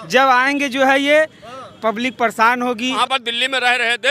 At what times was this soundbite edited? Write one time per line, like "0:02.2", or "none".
0:03.0

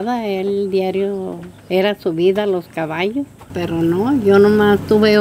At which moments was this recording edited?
0:03.6

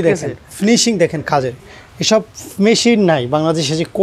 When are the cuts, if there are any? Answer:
none

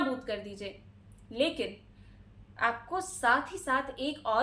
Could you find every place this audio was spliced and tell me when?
none

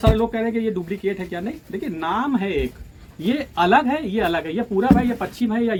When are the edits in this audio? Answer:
none

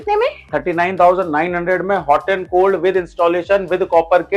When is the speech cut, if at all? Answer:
none

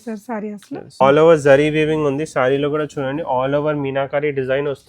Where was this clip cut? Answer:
0:01.0

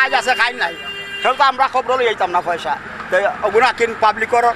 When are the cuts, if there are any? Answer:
none

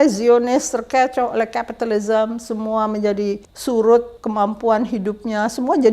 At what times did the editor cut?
0:03.5
0:04.2

